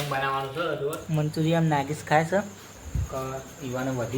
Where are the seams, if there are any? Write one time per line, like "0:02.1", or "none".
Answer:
0:01.0